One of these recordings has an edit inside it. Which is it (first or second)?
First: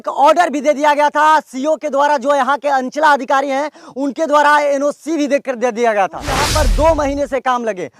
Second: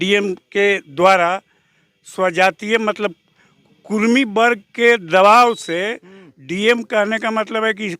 first